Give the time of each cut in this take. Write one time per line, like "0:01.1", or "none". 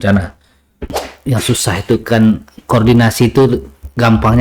0:01.0